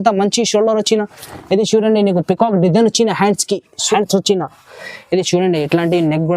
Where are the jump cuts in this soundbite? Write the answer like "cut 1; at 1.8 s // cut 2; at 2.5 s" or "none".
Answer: cut 1; at 3.8 s

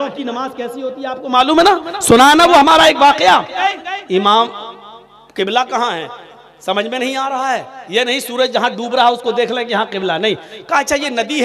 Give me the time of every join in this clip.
cut 1; at 3.7 s

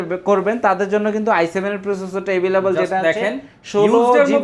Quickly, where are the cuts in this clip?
none

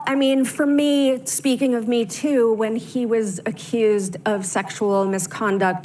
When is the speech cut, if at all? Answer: none

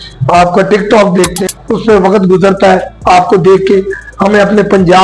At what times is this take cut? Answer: cut 1; at 1.4 s

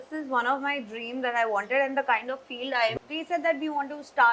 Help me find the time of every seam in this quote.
cut 1; at 2.9 s

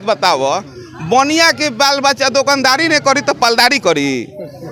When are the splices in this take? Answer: none

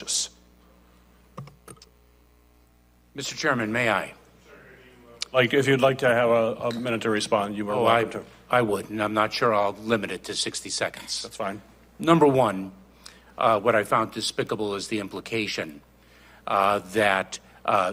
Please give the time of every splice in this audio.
none

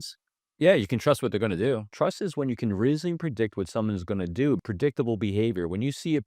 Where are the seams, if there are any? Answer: cut 1; at 1.9 s // cut 2; at 4.6 s

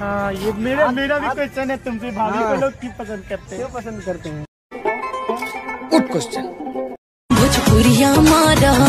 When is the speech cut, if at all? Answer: none

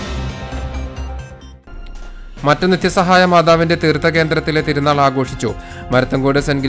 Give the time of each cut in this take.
cut 1; at 1.5 s

